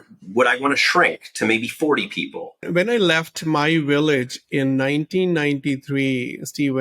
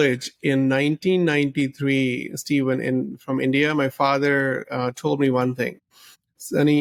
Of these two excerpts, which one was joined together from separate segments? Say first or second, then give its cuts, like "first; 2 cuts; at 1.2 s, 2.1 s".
first; 1 cut; at 2.7 s